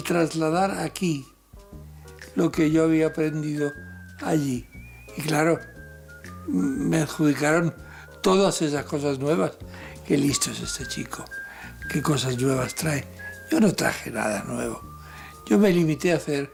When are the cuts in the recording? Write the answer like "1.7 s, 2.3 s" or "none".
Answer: none

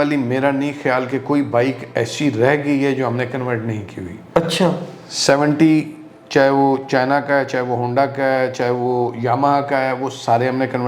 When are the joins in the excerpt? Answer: none

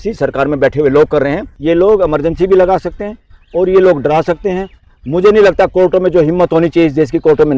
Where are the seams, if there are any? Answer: 1.5 s

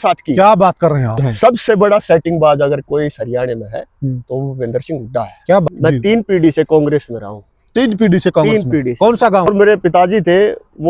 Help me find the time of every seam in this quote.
1.2 s, 5.7 s, 9.5 s

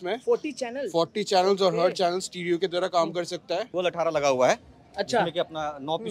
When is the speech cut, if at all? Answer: 3.7 s

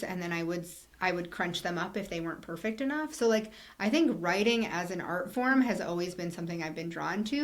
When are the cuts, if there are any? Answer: none

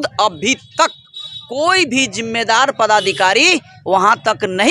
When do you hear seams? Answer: none

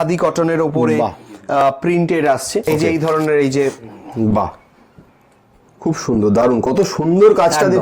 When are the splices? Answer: 2.6 s

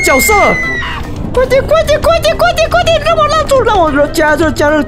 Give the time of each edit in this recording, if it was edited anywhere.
1.2 s

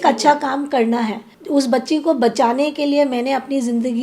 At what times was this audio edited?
1.3 s

